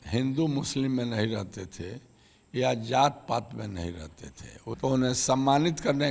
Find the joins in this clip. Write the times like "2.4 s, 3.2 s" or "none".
4.8 s